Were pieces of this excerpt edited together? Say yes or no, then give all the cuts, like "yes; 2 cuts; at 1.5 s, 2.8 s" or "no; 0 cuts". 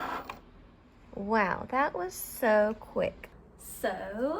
yes; 1 cut; at 3.3 s